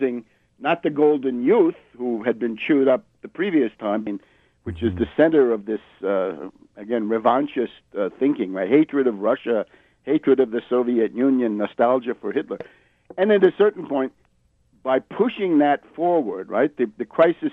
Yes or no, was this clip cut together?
no